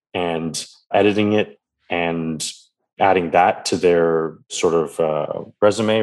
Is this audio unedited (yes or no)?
no